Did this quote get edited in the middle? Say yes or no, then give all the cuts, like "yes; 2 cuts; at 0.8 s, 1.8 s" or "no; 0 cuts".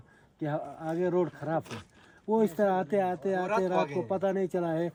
no; 0 cuts